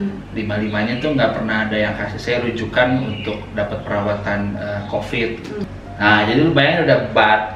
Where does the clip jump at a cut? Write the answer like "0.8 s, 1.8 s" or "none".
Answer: 5.6 s